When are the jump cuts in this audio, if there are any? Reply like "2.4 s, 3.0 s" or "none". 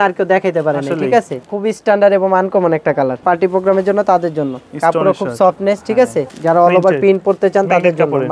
1.5 s, 3.2 s, 6.3 s